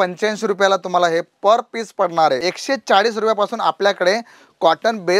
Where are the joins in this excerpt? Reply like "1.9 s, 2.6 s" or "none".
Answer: 2.5 s